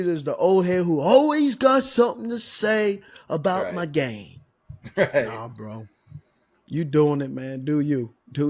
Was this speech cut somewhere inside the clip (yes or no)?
no